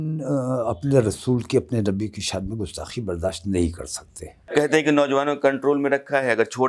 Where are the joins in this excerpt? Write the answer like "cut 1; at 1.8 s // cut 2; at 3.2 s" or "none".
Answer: cut 1; at 4.7 s